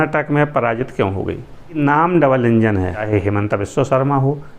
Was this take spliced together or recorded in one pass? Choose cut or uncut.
cut